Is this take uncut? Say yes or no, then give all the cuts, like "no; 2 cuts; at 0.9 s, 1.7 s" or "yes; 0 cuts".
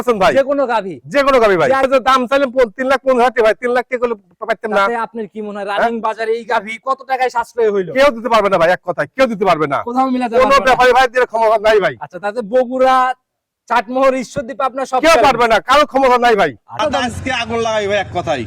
no; 2 cuts; at 1.8 s, 16.8 s